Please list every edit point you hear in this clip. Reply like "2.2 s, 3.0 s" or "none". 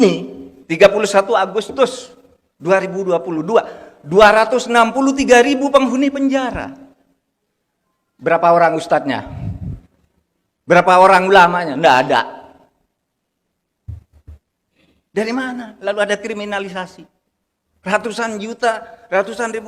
none